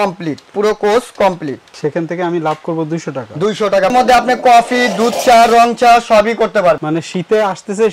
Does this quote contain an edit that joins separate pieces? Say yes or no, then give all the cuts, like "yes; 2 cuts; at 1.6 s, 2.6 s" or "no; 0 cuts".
yes; 1 cut; at 3.9 s